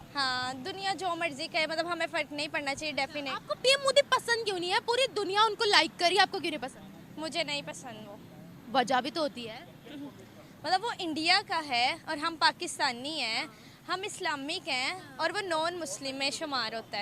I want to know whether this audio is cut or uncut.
cut